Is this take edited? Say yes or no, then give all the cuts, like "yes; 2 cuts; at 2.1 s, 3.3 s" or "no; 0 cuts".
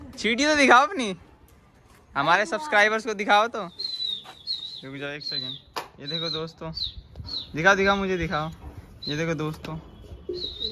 no; 0 cuts